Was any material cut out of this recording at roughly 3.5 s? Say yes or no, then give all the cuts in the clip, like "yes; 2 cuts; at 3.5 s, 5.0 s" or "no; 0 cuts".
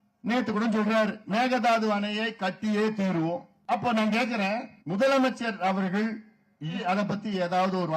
yes; 4 cuts; at 1.2 s, 3.5 s, 4.7 s, 6.8 s